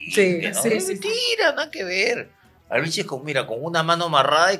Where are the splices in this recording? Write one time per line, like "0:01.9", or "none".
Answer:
none